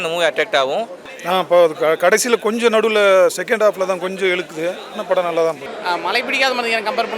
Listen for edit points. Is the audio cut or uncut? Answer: cut